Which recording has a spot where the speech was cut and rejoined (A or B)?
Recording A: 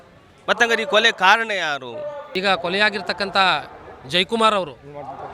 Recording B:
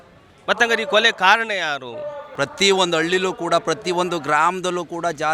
B